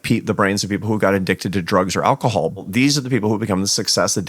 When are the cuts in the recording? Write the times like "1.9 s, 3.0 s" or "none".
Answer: 2.7 s